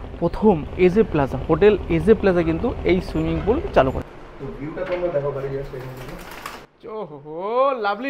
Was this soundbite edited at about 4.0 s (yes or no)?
yes